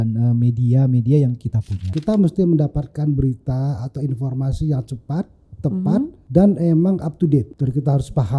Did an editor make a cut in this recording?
yes; 3 cuts; at 1.9 s, 6.2 s, 7.5 s

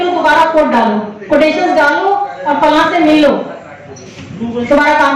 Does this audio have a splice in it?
no; 0 cuts

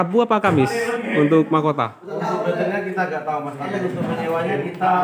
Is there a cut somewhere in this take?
no; 0 cuts

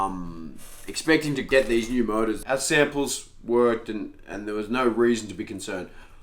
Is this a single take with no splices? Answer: no; 1 cut; at 2.4 s

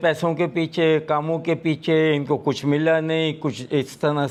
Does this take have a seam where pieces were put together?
no; 0 cuts

